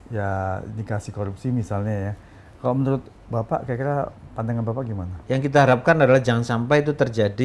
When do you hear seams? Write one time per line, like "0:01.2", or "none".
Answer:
0:05.1